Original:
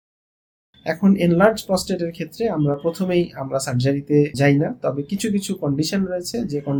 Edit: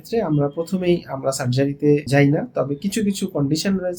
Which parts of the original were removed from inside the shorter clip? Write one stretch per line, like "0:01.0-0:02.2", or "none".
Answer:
none